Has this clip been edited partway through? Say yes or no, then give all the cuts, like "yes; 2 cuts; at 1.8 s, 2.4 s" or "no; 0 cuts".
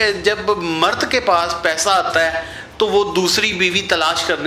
no; 0 cuts